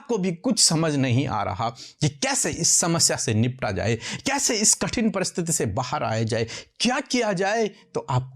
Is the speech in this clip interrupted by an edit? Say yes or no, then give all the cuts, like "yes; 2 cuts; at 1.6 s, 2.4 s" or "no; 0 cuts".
no; 0 cuts